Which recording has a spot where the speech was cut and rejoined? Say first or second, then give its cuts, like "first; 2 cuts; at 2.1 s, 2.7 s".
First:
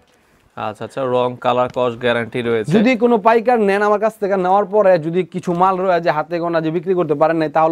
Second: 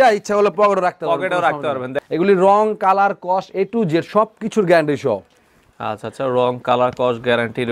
second; 1 cut; at 1.9 s